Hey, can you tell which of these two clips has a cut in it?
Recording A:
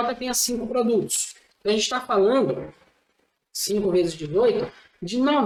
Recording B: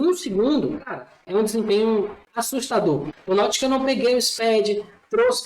B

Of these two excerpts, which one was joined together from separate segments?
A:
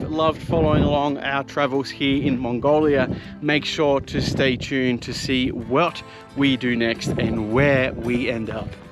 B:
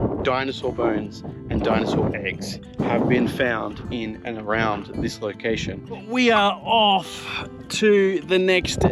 B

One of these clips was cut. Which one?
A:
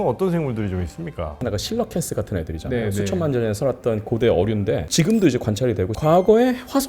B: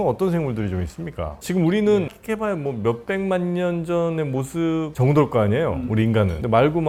A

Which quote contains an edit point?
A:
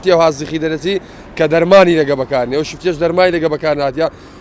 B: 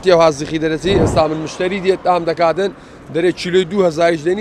B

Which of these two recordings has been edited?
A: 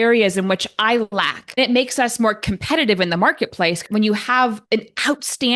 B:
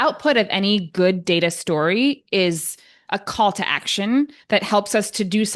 A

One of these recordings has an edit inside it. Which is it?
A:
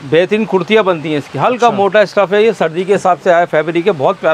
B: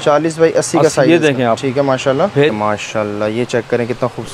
B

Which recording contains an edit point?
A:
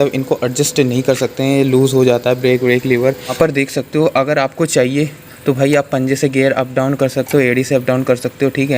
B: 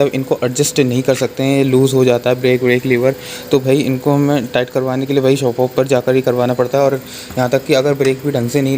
A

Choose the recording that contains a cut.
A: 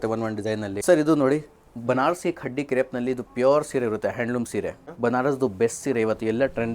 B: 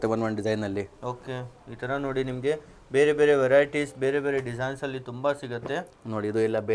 A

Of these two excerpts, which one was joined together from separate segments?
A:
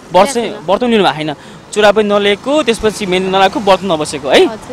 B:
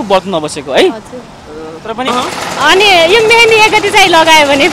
B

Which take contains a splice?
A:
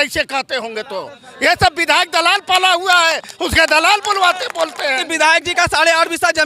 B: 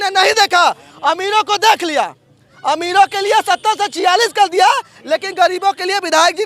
A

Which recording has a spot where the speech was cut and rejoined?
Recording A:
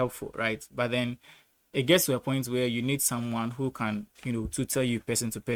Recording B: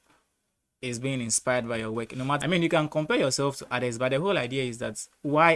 B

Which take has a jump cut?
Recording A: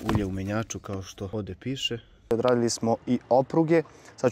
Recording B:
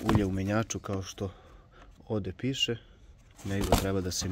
A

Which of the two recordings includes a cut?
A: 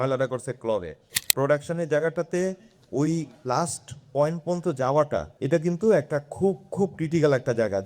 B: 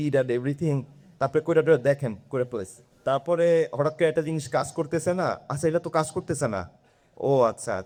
A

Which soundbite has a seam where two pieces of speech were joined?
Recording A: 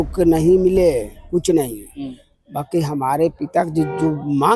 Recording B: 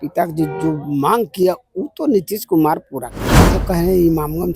B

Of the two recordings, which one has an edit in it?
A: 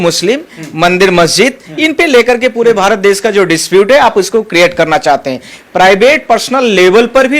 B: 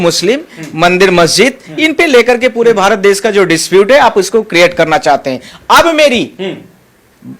A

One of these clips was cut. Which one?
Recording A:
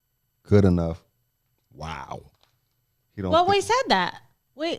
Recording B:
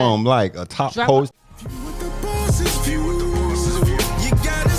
B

